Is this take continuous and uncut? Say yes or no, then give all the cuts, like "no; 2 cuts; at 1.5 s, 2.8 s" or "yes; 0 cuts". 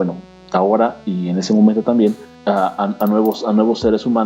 no; 1 cut; at 2.3 s